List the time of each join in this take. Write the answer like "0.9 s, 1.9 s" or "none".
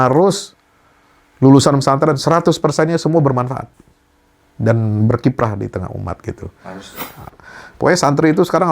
7.1 s